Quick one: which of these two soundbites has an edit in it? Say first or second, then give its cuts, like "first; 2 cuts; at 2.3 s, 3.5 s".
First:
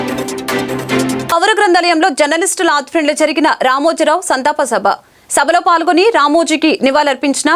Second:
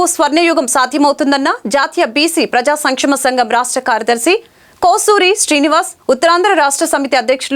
first; 1 cut; at 1.3 s